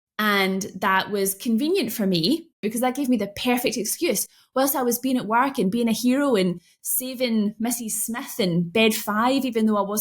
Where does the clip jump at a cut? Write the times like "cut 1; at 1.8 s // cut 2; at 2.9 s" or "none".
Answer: cut 1; at 2.7 s